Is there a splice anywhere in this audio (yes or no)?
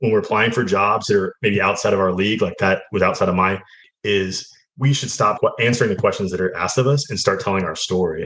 yes